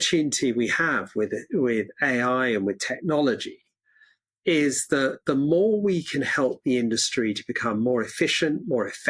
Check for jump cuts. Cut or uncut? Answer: uncut